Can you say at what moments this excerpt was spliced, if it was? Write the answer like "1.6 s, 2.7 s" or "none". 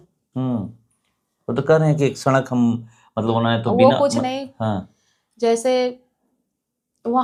none